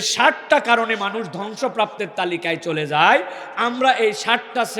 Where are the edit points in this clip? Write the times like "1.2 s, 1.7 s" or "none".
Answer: none